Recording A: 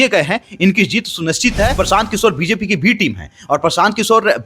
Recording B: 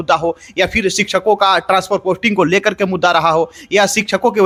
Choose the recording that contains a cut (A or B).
A